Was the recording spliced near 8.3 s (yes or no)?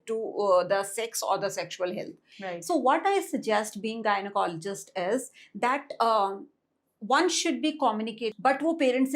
yes